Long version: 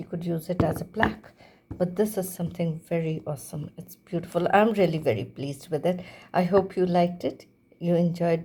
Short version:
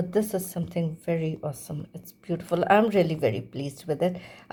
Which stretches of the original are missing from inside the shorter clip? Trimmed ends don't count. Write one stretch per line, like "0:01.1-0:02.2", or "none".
none